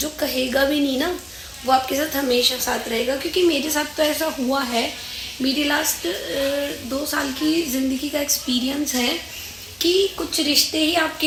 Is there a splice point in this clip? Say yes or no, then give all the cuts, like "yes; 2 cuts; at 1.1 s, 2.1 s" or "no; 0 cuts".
no; 0 cuts